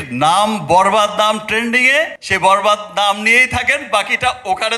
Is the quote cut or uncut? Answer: cut